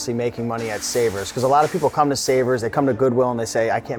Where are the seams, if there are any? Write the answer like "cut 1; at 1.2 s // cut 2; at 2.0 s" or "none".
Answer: none